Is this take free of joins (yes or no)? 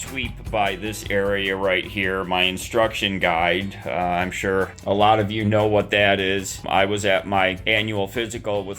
no